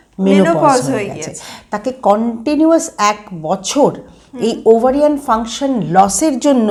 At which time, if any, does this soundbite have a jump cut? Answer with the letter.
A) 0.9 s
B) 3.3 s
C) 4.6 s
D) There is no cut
D